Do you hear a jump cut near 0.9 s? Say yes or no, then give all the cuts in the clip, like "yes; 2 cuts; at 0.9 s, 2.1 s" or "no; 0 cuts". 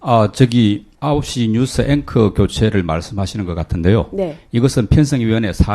yes; 1 cut; at 0.9 s